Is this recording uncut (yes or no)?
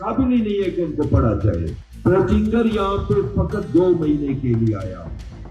no